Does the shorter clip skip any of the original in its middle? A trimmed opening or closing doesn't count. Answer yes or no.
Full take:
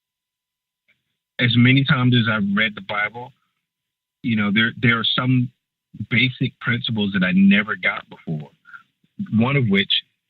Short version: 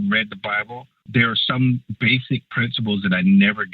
yes